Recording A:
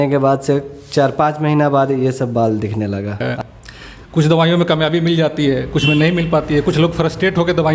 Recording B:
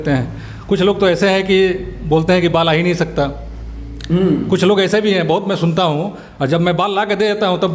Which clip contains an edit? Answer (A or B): A